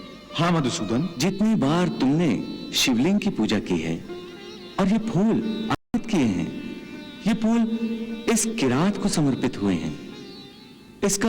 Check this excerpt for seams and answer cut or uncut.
cut